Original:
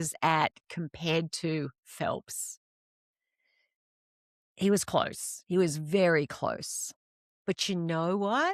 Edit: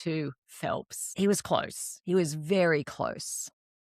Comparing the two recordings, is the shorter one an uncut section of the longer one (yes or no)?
no